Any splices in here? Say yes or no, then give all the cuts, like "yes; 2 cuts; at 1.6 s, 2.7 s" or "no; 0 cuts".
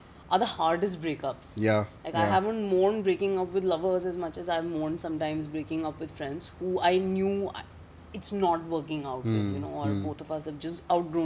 no; 0 cuts